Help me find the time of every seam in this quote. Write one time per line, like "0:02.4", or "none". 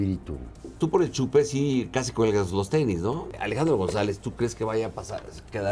0:00.8
0:03.4

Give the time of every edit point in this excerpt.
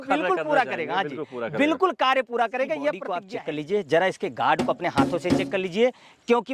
0:03.1

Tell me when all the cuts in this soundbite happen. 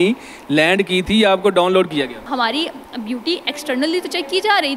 0:02.2

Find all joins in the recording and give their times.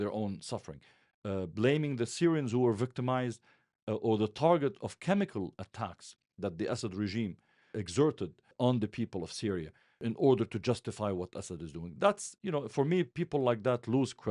0:07.7
0:08.5
0:09.9

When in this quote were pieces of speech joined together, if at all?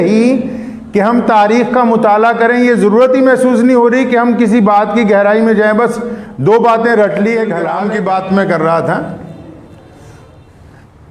0:07.7

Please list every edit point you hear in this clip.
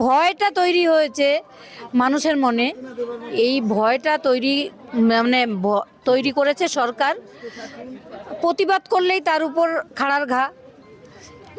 none

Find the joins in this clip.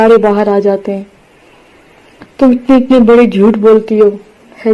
none

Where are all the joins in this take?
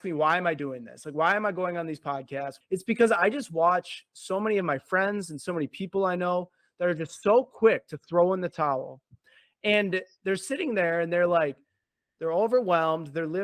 0:02.5

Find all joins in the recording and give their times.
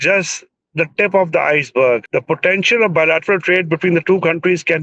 0:02.1

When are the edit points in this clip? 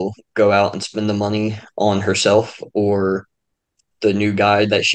none

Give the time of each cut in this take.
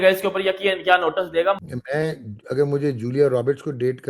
0:01.6

